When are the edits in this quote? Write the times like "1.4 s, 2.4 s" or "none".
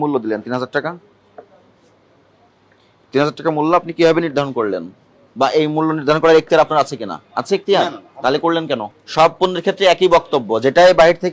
7.2 s, 9.0 s